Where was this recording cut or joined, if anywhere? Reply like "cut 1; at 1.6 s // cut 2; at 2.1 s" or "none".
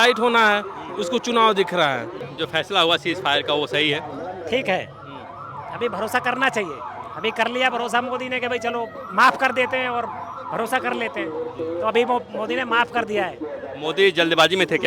cut 1; at 2.2 s